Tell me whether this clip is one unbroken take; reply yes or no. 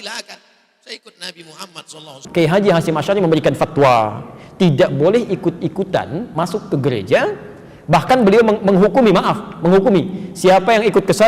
no